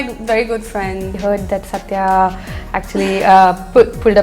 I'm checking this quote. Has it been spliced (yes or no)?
yes